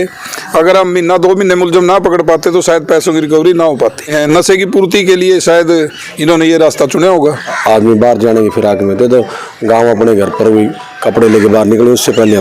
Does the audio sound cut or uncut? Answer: cut